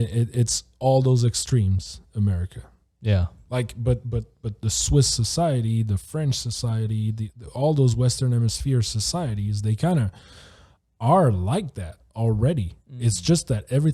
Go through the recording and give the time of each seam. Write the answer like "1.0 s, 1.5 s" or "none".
none

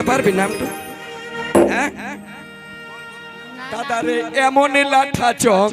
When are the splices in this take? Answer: 3.9 s

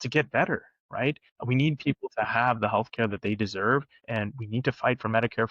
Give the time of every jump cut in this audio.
1.3 s, 4.0 s

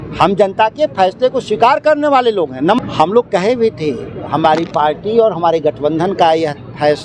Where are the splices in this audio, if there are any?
2.8 s

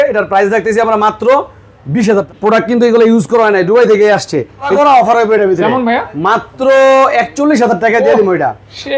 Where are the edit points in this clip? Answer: 2.0 s, 4.7 s

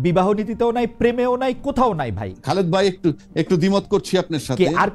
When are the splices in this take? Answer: 2.3 s

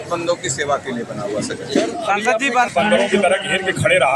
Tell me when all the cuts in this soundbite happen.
2.7 s

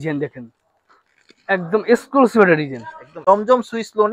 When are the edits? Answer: 3.2 s

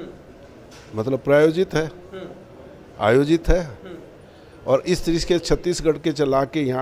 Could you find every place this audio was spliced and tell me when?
none

